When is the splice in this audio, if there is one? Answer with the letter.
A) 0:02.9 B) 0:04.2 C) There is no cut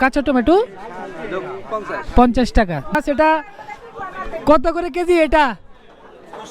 A